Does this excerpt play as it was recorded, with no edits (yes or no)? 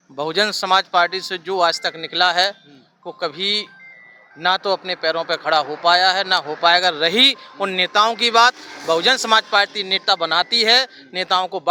yes